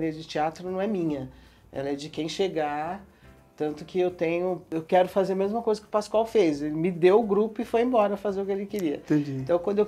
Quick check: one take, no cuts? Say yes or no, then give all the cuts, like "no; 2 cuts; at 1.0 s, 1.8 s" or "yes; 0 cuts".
yes; 0 cuts